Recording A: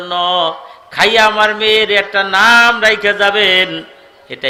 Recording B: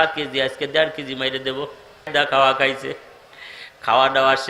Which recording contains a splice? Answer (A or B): B